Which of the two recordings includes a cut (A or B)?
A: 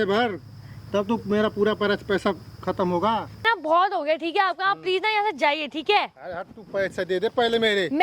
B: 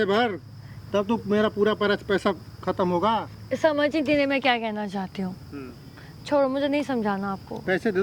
A